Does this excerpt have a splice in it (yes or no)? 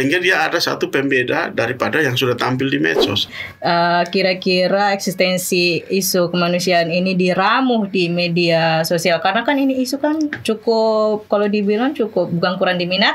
yes